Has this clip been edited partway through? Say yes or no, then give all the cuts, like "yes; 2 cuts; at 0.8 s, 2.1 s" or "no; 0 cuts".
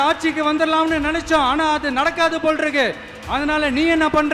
no; 0 cuts